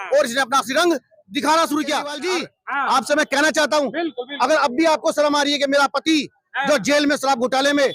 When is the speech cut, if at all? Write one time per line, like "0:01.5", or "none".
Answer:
0:02.2